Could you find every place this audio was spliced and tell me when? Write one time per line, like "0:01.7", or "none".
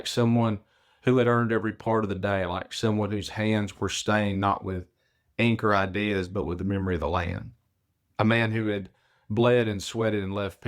none